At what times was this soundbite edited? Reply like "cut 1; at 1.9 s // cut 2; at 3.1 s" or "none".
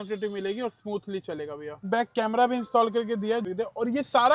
cut 1; at 1.8 s // cut 2; at 3.4 s